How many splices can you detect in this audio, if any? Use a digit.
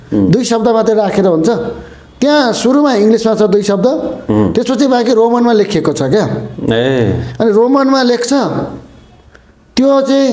0